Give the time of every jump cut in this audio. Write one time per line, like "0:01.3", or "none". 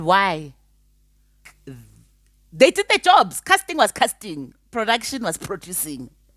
0:01.5